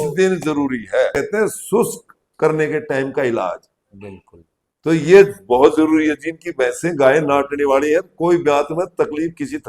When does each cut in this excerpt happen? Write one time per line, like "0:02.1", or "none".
0:01.1